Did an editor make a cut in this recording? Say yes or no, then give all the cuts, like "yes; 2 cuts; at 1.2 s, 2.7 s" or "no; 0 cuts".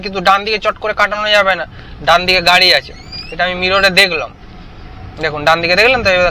no; 0 cuts